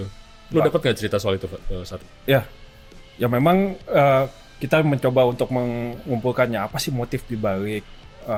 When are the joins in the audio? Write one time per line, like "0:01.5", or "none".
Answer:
none